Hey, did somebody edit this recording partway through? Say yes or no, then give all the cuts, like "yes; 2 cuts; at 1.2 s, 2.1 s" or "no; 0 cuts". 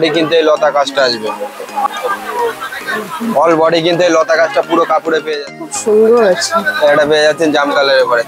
yes; 2 cuts; at 1.9 s, 5.7 s